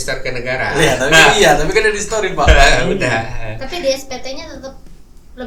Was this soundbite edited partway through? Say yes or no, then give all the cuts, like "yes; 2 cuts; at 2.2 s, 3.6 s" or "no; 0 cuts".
no; 0 cuts